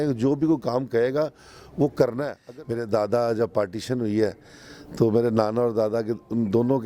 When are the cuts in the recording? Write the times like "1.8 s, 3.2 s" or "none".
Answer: 2.4 s

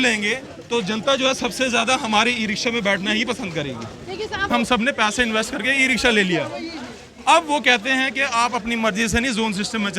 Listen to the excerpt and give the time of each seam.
4.5 s

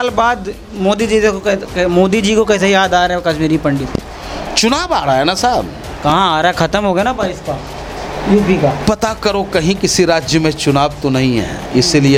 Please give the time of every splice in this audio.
none

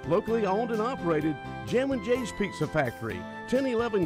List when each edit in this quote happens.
2.2 s

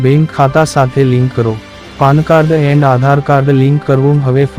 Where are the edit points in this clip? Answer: none

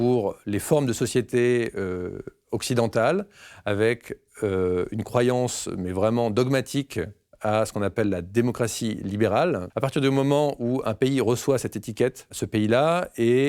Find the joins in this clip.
9.7 s, 12.4 s

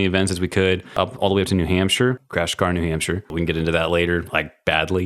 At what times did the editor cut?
1.0 s, 2.2 s, 3.3 s

